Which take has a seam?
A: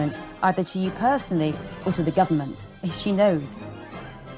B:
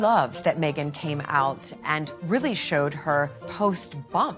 B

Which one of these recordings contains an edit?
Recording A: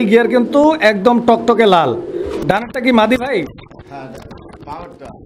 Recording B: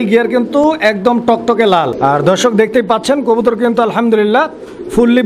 B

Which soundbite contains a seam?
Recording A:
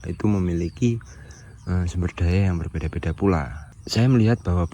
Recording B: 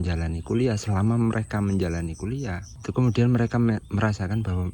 A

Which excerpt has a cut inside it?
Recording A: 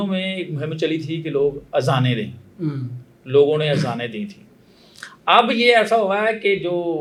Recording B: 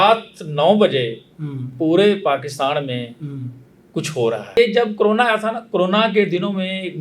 B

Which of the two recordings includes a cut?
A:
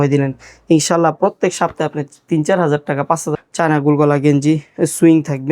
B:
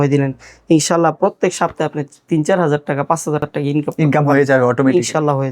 A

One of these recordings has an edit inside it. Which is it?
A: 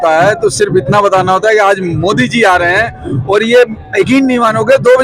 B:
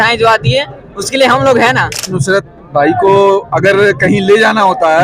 B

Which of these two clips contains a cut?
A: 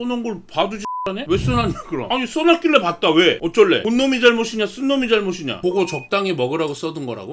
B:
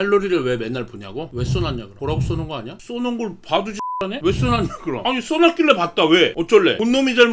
A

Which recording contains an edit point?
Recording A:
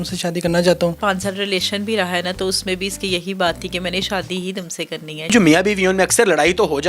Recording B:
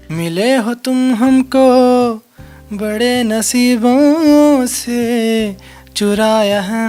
A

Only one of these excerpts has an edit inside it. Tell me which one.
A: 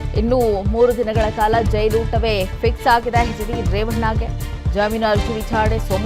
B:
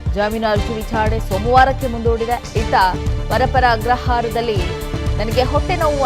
B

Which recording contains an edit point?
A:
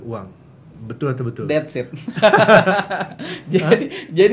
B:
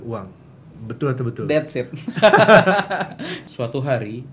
B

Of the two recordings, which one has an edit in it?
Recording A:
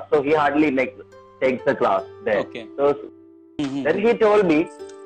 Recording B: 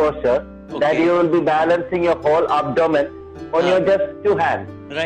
A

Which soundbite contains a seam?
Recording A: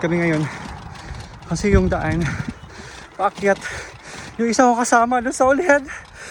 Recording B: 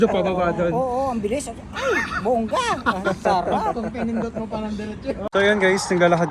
B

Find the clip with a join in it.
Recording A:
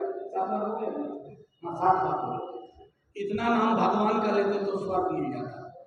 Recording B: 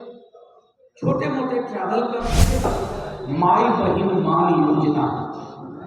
B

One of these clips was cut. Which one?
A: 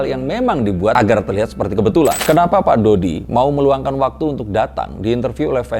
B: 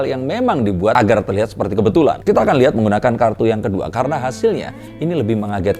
A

